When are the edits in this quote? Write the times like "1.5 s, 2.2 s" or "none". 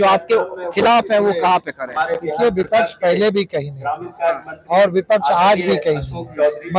none